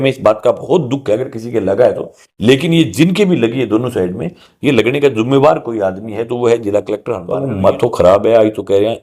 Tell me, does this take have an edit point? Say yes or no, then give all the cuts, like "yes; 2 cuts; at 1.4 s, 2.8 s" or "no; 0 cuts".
yes; 1 cut; at 7.3 s